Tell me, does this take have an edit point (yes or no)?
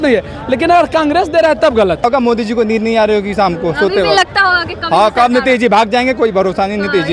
yes